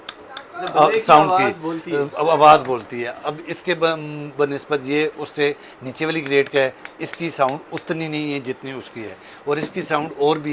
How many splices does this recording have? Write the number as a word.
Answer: zero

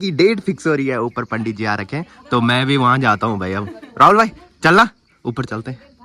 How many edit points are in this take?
zero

